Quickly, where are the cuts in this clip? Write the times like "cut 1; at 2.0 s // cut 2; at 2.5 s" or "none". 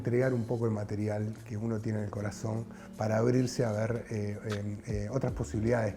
none

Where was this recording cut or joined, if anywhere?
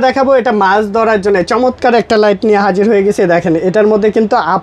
none

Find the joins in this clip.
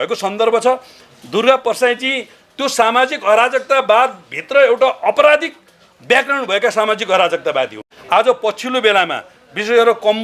none

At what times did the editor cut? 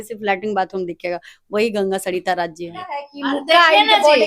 cut 1; at 3.1 s

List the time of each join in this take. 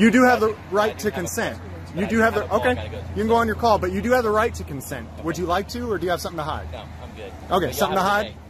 none

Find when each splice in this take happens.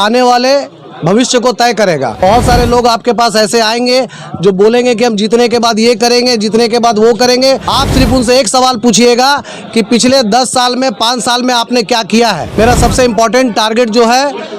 cut 1; at 2.2 s // cut 2; at 7.7 s // cut 3; at 12.5 s

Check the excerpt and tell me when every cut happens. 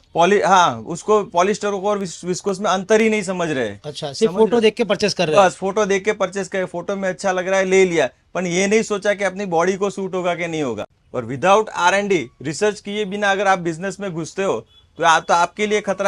cut 1; at 10.9 s

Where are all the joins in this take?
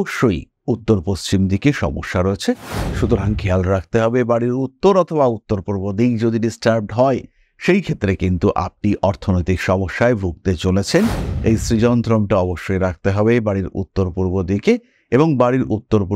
cut 1; at 2.7 s // cut 2; at 11.3 s

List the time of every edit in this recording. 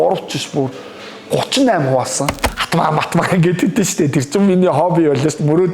cut 1; at 2.3 s

